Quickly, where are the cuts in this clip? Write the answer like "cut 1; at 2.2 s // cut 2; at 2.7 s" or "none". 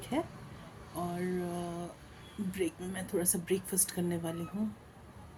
none